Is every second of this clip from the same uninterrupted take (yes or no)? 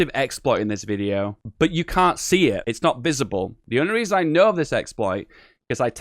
no